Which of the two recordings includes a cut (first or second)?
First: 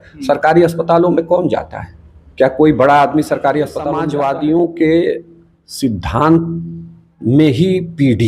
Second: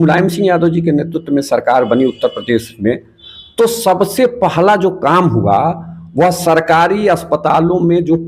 first